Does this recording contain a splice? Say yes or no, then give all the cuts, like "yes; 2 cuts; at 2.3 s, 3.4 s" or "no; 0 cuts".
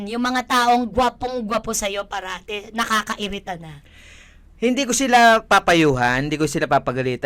no; 0 cuts